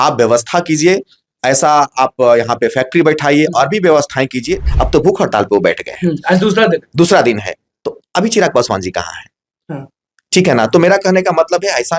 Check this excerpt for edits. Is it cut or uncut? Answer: cut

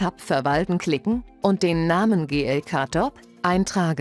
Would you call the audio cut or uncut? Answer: cut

